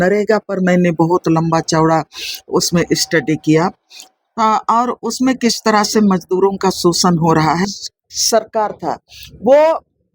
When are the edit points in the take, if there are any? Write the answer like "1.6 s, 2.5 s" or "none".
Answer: 7.7 s